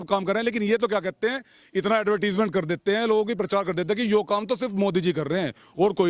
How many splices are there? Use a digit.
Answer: 0